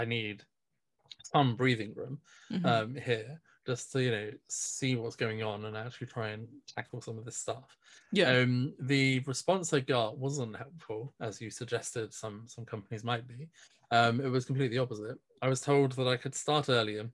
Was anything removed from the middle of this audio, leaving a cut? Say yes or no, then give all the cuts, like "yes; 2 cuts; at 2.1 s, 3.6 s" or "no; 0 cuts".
no; 0 cuts